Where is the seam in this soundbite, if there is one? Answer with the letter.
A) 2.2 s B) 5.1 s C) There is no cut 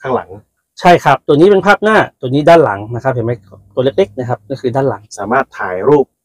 B